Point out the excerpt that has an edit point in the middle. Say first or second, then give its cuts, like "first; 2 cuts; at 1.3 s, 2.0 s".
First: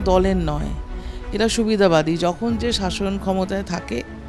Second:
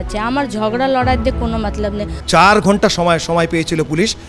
second; 1 cut; at 2.1 s